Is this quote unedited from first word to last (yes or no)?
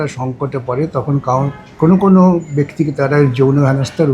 yes